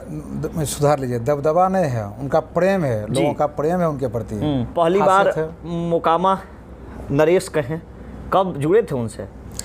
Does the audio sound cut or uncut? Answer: cut